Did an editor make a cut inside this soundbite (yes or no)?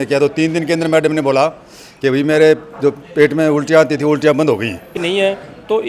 yes